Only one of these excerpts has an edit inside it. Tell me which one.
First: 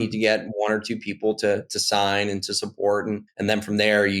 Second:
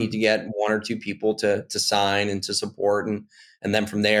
first; 1 cut; at 3.3 s

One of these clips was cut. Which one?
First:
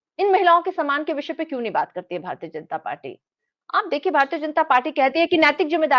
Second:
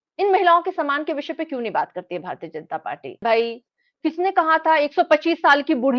second; 1 cut; at 3.2 s

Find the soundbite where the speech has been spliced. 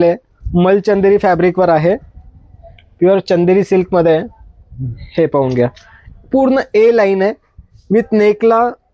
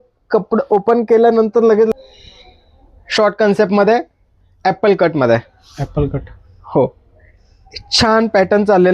second; 1 cut; at 1.9 s

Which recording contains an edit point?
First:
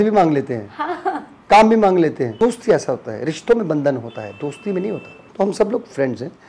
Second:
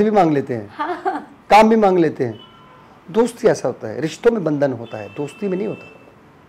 first; 2 cuts; at 2.3 s, 5.2 s

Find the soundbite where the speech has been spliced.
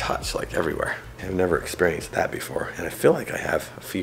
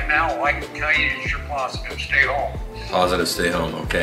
first; 1 cut; at 1.2 s

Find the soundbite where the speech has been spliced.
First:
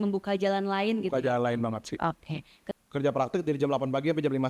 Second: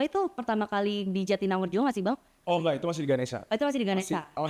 first; 1 cut; at 2.6 s

